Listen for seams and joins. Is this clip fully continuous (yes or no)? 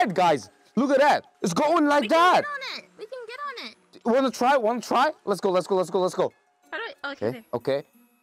no